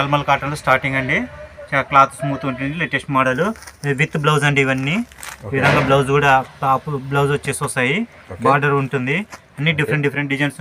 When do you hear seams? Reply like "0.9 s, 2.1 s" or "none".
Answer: none